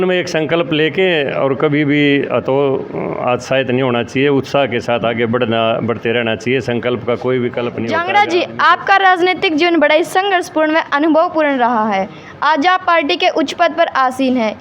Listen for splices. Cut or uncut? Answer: cut